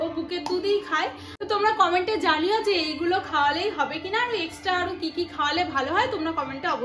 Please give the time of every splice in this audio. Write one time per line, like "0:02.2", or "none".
0:01.3

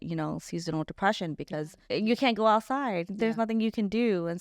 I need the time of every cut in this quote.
0:01.8

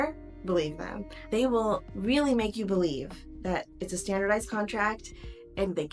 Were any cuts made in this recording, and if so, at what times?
0:01.3

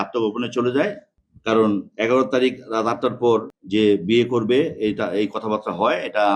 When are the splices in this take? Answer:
none

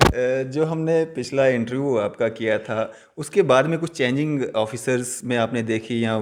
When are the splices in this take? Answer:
none

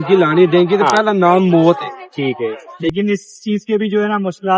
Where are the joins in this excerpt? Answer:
0:02.9

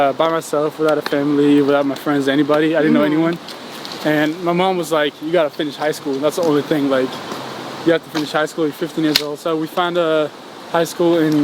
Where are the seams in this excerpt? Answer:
none

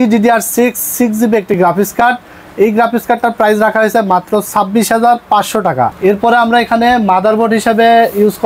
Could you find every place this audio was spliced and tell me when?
none

